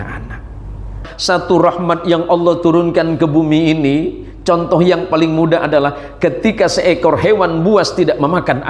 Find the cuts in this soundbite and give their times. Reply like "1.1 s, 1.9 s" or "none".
1.1 s